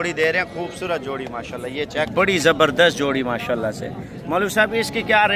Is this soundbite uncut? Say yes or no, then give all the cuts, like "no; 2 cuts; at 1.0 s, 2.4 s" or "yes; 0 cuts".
no; 1 cut; at 2.1 s